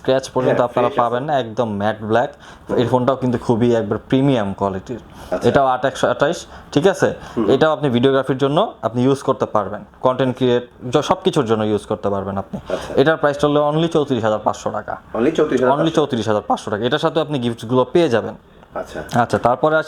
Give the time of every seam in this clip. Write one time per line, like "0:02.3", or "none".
none